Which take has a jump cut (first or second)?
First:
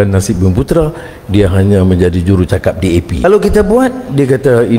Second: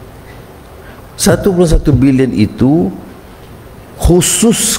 first